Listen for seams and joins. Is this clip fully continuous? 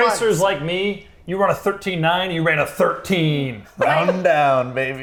yes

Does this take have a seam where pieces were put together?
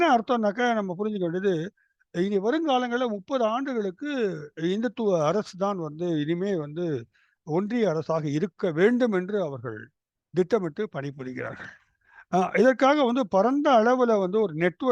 no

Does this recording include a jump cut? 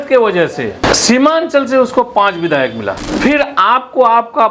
yes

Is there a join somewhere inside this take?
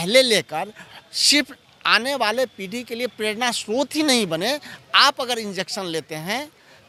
no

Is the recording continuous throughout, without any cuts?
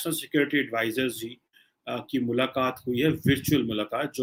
yes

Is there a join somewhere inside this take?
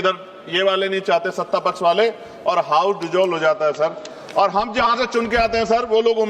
no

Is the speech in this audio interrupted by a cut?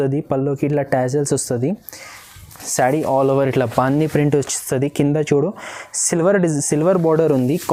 no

